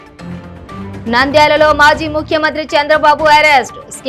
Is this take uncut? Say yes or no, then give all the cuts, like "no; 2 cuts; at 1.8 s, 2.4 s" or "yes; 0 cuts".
no; 1 cut; at 0.9 s